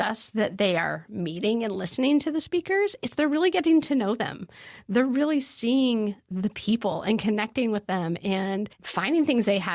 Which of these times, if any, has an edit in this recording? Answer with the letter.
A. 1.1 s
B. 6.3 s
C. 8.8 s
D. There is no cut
C